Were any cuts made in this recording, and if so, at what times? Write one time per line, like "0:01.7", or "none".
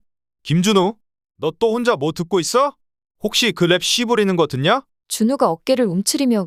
none